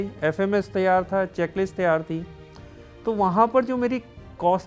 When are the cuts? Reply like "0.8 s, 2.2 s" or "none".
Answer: none